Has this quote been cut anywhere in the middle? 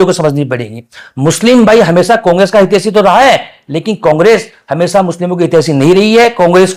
no; 0 cuts

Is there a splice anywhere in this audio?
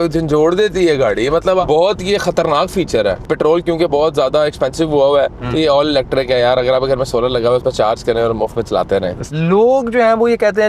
yes; 3 cuts; at 1.6 s, 3.3 s, 9.3 s

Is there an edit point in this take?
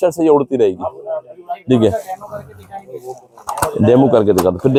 no; 0 cuts

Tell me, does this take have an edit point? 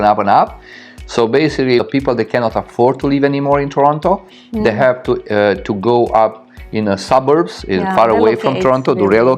yes; 1 cut; at 1.8 s

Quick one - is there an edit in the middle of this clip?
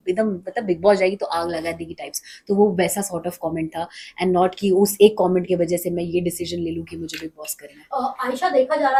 no; 0 cuts

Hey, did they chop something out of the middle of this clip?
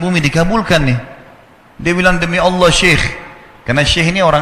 no; 0 cuts

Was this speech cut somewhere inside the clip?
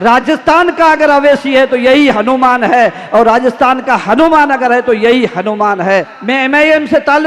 yes; 1 cut; at 6.2 s

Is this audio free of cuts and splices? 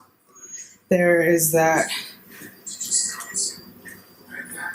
yes; 0 cuts

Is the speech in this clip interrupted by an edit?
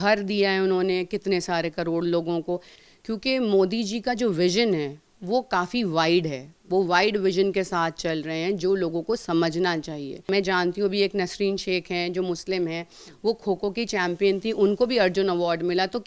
yes; 2 cuts; at 2.7 s, 10.3 s

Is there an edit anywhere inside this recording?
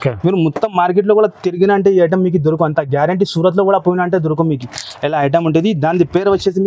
no; 0 cuts

